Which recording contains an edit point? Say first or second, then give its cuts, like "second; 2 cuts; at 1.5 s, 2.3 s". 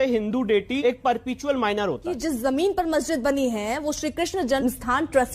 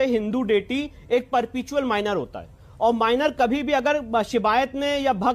first; 3 cuts; at 0.8 s, 2.1 s, 4.6 s